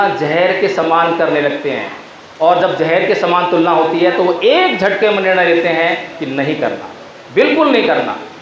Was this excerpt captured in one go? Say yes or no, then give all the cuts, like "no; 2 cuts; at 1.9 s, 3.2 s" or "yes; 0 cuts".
yes; 0 cuts